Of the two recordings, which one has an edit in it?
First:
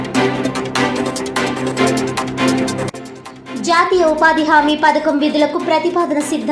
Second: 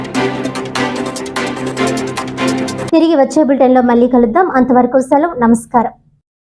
first; 1 cut; at 2.8 s

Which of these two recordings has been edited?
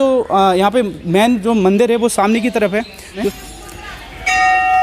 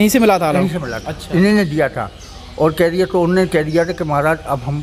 first; 1 cut; at 3.3 s

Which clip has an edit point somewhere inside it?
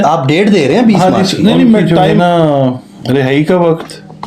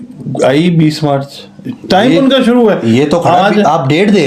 first; 1 cut; at 2.0 s

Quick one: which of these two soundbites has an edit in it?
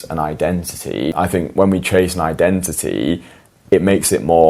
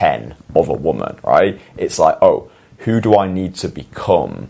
first; 1 cut; at 1.1 s

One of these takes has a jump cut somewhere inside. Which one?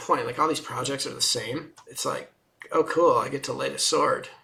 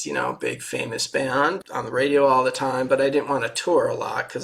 second; 1 cut; at 1.6 s

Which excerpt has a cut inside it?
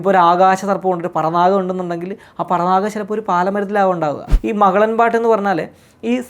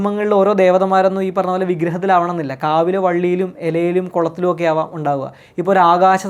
first; 1 cut; at 4.3 s

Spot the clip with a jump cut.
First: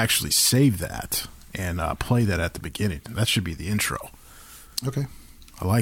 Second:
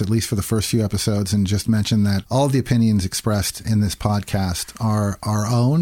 second; 1 cut; at 2.2 s

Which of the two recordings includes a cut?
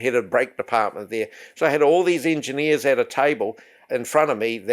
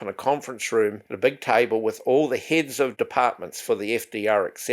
second; 2 cuts; at 1.1 s, 2.9 s

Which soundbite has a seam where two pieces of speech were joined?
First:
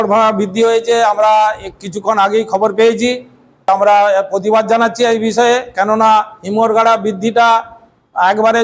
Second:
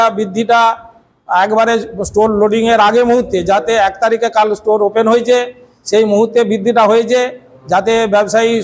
first; 1 cut; at 3.7 s

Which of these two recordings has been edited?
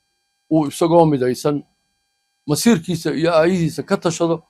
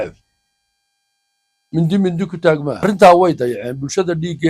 second; 1 cut; at 2.8 s

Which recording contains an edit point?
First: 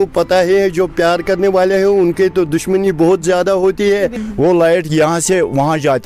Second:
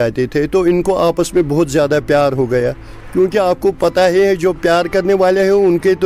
first; 1 cut; at 4.2 s

